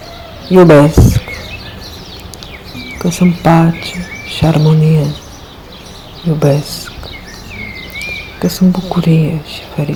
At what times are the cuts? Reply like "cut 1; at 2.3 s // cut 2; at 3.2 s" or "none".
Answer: none